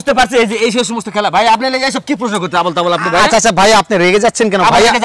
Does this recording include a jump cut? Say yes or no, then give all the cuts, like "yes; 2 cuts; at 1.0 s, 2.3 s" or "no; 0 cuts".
no; 0 cuts